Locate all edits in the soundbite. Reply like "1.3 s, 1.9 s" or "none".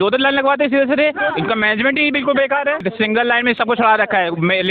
2.8 s